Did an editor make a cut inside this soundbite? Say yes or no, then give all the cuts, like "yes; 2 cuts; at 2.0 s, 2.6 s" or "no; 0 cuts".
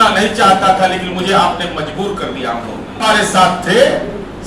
yes; 1 cut; at 2.9 s